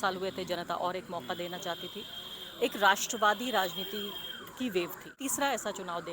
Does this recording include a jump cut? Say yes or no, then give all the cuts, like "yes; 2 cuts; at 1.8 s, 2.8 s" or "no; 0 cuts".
yes; 1 cut; at 5.2 s